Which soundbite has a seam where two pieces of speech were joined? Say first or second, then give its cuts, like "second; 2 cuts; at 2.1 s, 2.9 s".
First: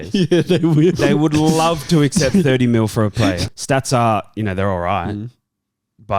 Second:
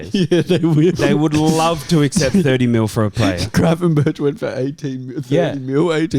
first; 1 cut; at 3.4 s